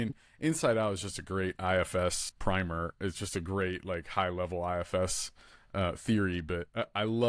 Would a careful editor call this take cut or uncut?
cut